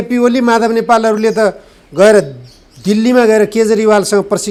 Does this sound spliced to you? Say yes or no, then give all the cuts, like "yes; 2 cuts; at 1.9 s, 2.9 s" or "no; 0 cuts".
no; 0 cuts